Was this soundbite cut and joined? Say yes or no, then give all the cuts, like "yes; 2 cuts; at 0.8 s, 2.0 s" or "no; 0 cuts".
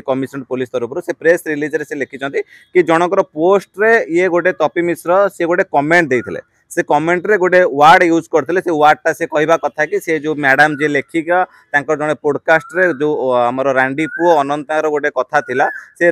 no; 0 cuts